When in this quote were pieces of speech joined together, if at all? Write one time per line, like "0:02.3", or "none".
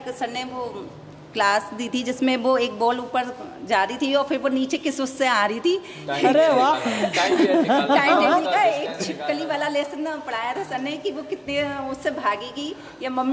none